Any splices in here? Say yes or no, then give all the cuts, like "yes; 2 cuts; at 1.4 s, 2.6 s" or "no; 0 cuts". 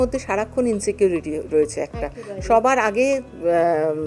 no; 0 cuts